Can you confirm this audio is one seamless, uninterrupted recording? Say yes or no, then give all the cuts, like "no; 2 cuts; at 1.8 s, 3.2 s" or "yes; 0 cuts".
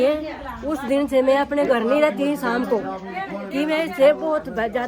no; 1 cut; at 1.0 s